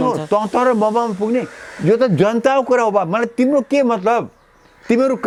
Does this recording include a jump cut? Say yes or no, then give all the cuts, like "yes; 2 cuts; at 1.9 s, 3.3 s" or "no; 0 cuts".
no; 0 cuts